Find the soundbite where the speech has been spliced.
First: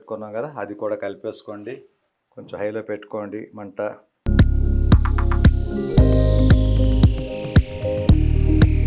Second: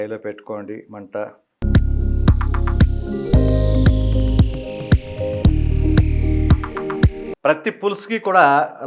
second; 1 cut; at 7.2 s

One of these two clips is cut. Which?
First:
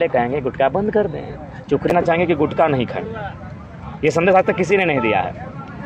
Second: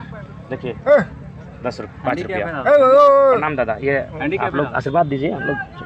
first; 1 cut; at 1.9 s

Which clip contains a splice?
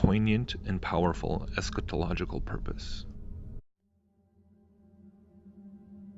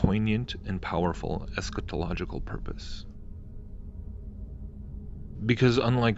second; 1 cut; at 3.6 s

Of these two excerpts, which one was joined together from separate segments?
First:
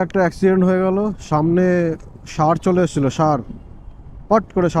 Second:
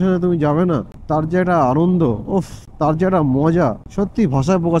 second; 3 cuts; at 0.9 s, 2.6 s, 3.8 s

